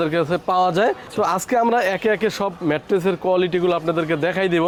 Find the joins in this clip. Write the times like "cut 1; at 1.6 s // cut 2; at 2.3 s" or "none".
none